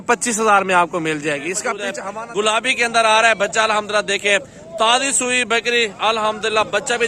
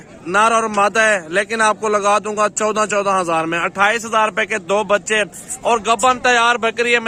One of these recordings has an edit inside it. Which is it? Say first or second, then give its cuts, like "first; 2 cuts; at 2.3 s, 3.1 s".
first; 1 cut; at 1.9 s